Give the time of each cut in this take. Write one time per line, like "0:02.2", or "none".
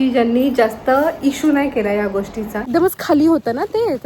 0:02.7